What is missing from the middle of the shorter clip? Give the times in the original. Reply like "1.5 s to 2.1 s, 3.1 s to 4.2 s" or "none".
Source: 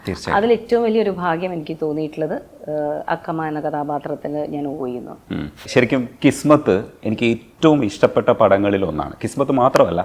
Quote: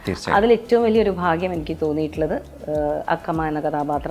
none